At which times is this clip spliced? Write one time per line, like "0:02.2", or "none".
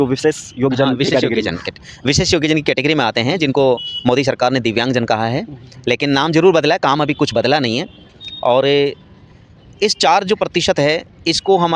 none